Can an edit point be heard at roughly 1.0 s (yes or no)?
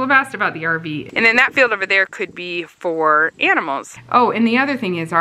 yes